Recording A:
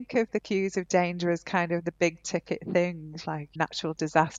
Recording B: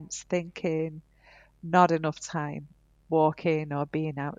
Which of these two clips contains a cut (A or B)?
A